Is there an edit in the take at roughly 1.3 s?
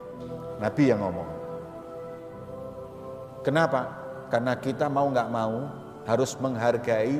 yes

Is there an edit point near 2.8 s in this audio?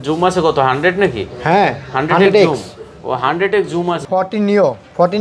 no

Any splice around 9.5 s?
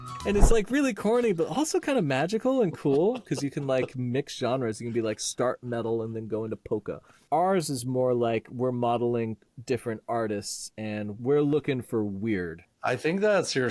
yes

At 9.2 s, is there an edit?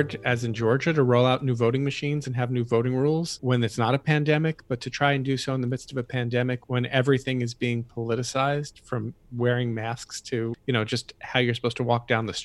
yes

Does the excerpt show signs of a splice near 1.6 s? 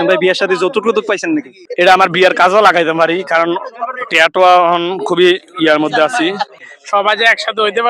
yes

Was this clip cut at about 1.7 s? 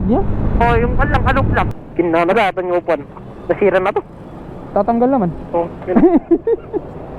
yes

